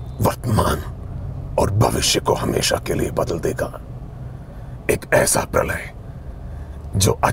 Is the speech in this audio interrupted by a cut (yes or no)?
no